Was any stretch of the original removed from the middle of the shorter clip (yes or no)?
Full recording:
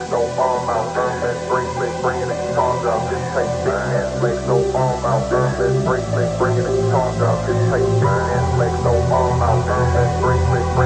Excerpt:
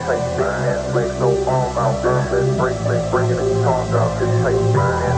no